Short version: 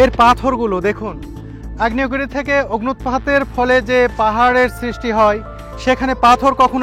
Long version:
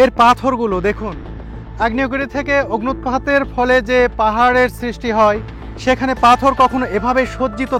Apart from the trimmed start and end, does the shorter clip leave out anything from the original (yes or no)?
no